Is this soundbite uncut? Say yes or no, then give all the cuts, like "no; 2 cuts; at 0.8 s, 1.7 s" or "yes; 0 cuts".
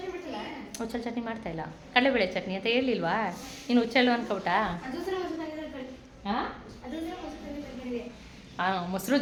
yes; 0 cuts